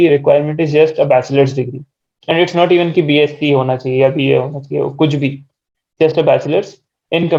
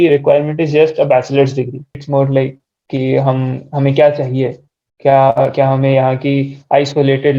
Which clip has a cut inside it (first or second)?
second